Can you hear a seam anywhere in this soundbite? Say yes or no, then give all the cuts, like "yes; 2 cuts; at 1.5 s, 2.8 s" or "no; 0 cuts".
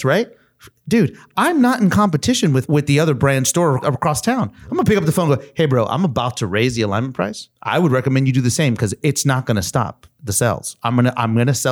yes; 3 cuts; at 2.7 s, 3.8 s, 7.5 s